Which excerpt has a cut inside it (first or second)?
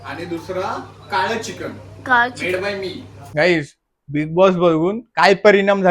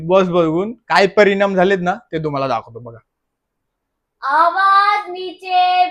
first